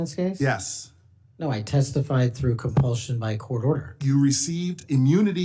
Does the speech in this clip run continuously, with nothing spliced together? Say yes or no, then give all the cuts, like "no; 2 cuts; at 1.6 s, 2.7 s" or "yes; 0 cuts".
yes; 0 cuts